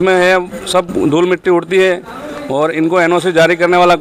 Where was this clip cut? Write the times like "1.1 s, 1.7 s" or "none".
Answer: none